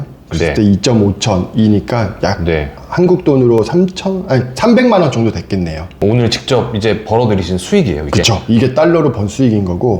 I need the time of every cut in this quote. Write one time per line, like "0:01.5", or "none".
none

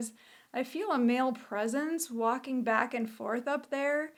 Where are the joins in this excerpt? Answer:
none

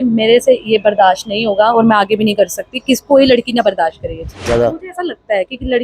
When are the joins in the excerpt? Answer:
0:04.5

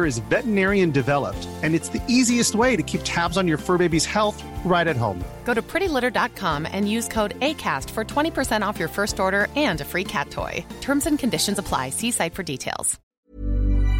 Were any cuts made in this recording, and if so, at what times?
0:13.0

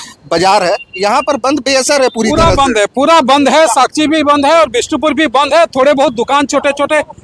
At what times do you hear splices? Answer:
none

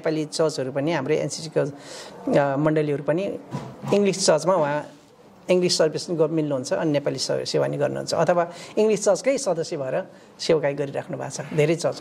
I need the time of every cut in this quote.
none

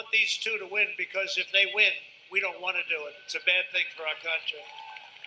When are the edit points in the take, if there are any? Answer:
none

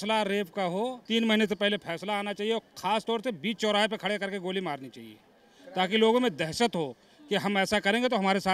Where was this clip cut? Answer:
0:01.0

